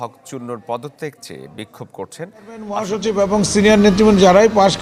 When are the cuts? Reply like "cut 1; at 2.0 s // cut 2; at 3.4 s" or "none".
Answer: cut 1; at 2.9 s